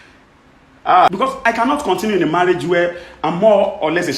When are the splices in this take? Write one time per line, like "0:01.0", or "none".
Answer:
0:01.1